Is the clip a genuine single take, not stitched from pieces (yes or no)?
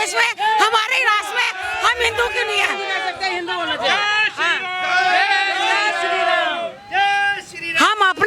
yes